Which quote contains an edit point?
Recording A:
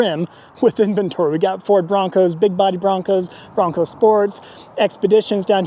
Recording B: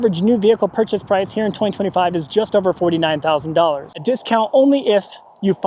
B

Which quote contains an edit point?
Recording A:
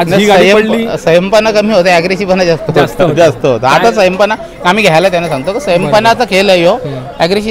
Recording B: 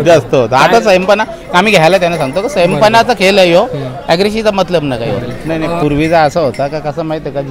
B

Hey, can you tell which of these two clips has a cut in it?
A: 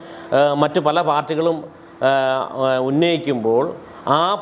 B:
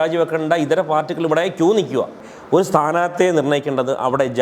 B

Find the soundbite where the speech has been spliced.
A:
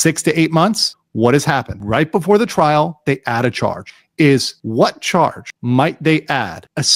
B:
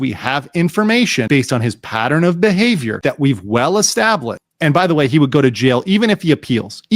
B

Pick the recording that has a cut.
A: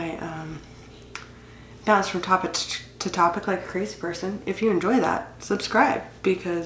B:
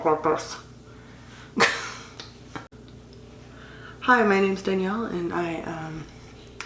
B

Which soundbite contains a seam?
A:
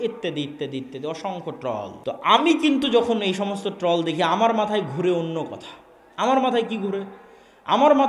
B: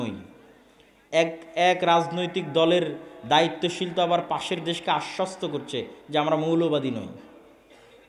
A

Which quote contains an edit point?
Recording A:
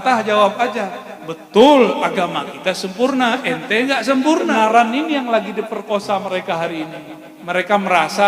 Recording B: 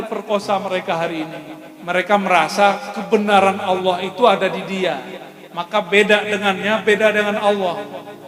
A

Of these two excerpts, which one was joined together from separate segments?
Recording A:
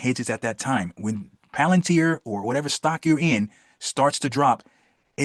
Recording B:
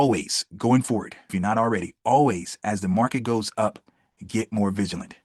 B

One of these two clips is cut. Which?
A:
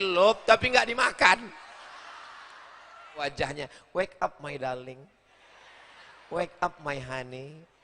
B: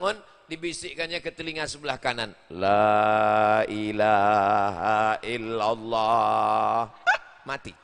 A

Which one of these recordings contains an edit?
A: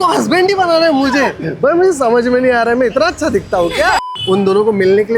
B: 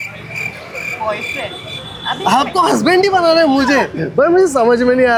A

